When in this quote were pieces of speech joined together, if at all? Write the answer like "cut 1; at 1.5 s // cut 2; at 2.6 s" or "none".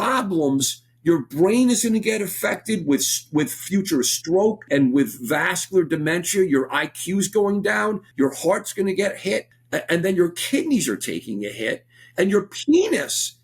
cut 1; at 4.7 s // cut 2; at 8.0 s // cut 3; at 9.6 s